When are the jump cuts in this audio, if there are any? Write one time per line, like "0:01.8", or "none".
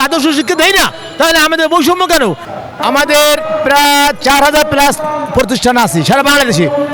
0:02.4

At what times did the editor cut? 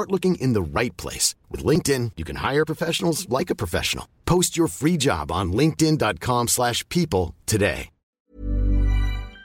0:08.2

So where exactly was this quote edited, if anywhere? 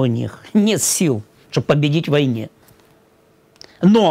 none

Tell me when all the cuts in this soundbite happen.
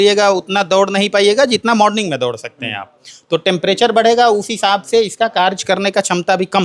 none

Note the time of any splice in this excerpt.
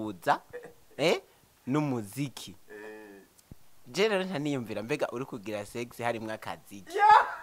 none

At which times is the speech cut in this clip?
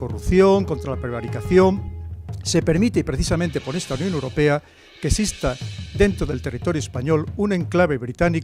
0:05.3

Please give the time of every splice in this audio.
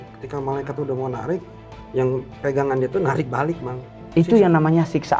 0:04.0

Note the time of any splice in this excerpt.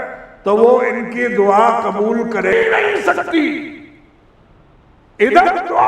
0:02.5

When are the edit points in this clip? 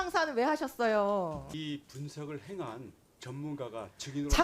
0:01.5

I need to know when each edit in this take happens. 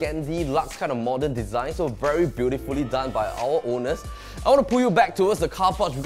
none

